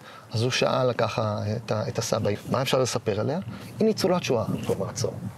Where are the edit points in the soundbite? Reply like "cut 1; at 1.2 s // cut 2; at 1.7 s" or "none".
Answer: cut 1; at 2.3 s